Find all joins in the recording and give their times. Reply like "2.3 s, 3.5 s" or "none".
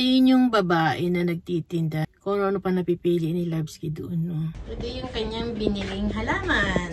2.1 s, 4.7 s